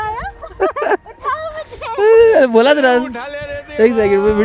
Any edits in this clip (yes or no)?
no